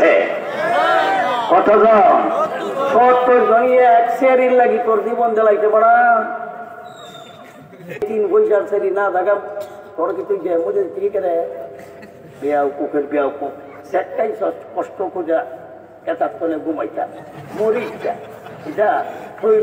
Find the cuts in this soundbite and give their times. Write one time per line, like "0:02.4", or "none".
0:08.1